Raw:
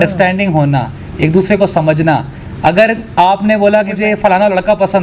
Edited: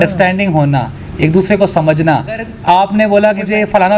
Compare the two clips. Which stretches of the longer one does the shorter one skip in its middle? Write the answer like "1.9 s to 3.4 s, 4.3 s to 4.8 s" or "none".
2.5 s to 3.0 s